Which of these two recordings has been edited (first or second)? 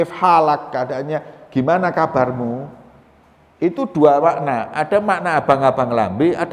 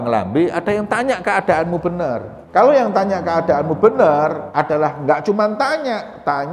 second